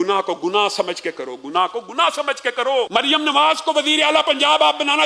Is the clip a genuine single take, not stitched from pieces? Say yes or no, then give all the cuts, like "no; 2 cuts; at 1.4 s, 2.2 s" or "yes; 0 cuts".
no; 1 cut; at 2.9 s